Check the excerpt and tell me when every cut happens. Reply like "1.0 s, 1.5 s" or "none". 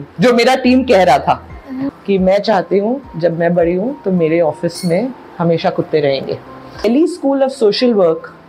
1.8 s, 6.8 s